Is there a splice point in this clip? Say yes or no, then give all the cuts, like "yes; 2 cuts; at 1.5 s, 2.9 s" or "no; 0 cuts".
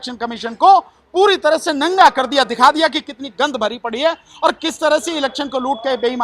no; 0 cuts